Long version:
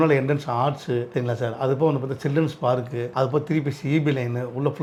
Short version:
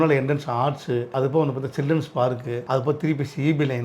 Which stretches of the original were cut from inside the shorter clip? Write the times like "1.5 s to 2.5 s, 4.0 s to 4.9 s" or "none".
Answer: 1.1 s to 1.5 s